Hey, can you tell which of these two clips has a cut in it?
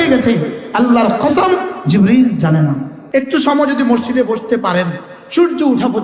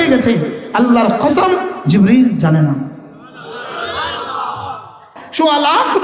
first; 1 cut; at 2.9 s

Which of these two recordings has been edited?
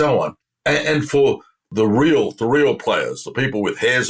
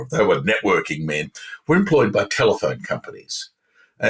first; 1 cut; at 1.7 s

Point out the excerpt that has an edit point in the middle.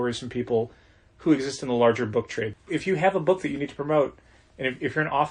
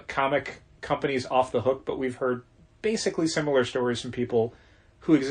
first; 1 cut; at 2.6 s

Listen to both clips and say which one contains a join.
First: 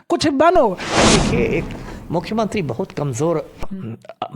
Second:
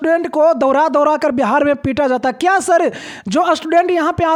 first; 1 cut; at 0.9 s

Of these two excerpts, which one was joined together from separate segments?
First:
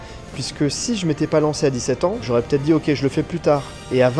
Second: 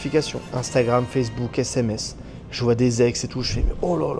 first; 1 cut; at 2.2 s

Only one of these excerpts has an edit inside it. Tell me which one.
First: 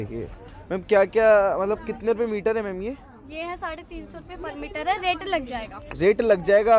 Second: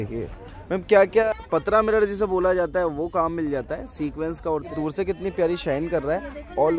second; 2 cuts; at 1.2 s, 4.7 s

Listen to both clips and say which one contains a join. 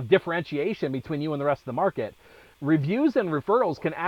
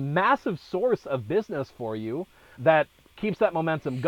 second; 1 cut; at 3.2 s

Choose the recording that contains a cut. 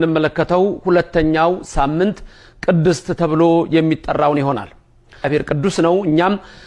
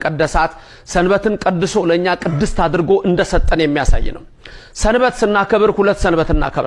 first; 1 cut; at 5.3 s

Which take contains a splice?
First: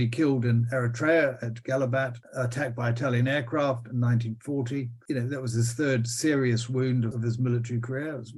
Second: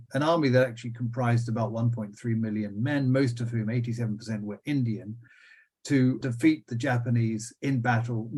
first; 1 cut; at 7.1 s

